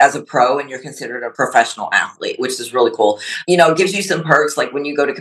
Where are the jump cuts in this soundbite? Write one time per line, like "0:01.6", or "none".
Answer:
0:01.2